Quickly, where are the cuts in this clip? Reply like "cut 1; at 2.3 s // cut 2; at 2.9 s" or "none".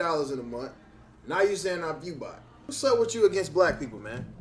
cut 1; at 1.2 s